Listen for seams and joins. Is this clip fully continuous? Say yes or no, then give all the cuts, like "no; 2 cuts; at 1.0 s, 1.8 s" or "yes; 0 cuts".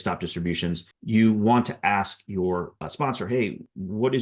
yes; 0 cuts